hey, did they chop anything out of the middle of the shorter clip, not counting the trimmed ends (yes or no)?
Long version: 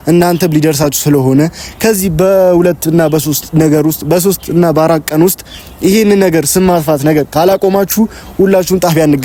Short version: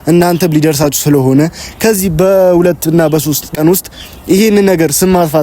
yes